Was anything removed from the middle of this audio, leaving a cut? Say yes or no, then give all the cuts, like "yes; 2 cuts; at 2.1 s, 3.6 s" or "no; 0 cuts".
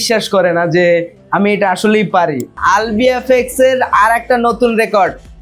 yes; 1 cut; at 2.6 s